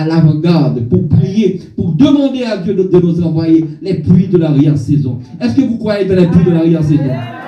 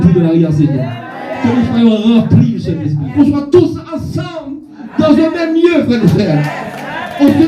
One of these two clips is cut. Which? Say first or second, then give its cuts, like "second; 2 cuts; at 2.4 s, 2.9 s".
second; 1 cut; at 3.0 s